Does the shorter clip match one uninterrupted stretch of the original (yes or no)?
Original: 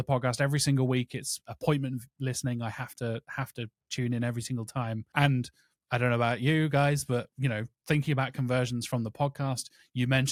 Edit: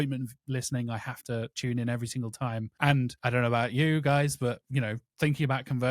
no